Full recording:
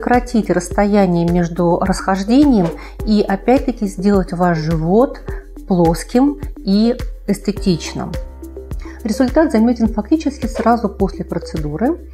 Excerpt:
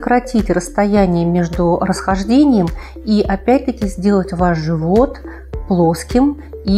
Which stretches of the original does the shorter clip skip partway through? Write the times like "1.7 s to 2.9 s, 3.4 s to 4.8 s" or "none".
none